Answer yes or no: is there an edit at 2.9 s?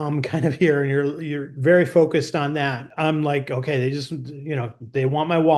yes